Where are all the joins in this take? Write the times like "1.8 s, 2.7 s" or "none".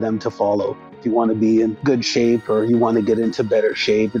1.0 s